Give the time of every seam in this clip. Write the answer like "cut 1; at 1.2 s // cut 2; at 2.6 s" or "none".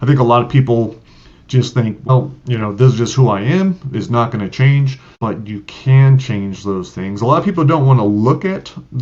cut 1; at 2.1 s // cut 2; at 5.0 s